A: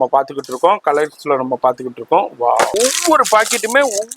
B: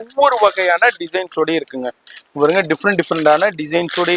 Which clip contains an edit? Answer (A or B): A